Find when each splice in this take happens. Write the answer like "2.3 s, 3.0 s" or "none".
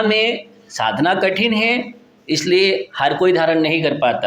none